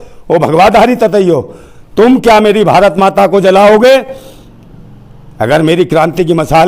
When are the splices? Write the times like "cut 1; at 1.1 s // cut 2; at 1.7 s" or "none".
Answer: none